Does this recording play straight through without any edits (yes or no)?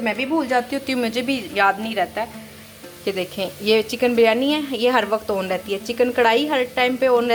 yes